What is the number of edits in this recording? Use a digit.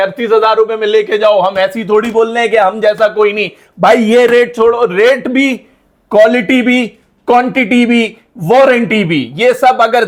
0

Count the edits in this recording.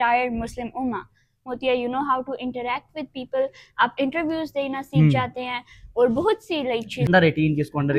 2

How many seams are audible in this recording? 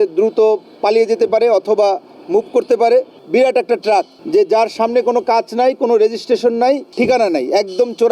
3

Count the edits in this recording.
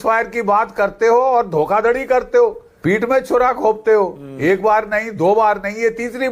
1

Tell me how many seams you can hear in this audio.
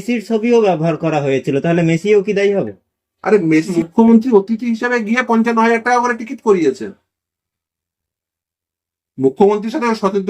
1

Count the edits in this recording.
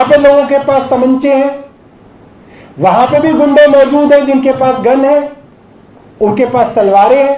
0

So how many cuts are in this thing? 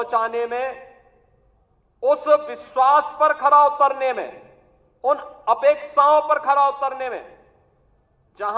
0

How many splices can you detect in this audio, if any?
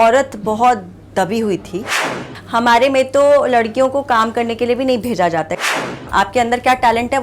2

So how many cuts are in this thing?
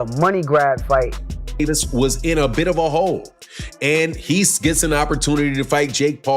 1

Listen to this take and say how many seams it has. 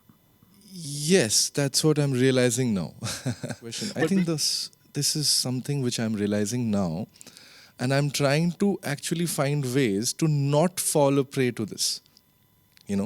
1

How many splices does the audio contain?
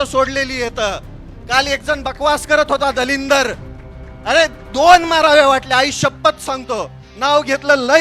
0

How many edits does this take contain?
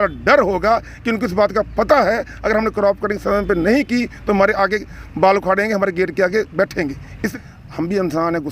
1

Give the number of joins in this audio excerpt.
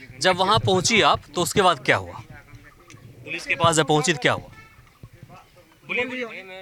0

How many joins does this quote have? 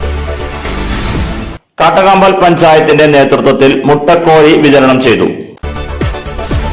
0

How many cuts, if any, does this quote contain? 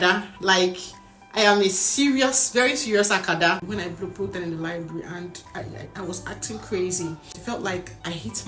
2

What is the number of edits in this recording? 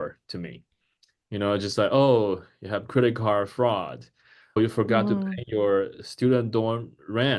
1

